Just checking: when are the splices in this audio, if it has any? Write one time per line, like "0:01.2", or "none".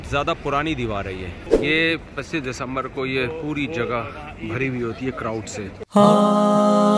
0:01.4
0:05.8